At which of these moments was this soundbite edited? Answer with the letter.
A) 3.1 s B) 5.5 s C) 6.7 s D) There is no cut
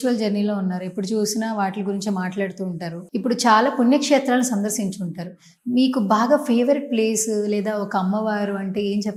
D